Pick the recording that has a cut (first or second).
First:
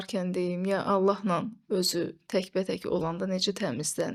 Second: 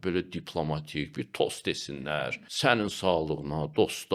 second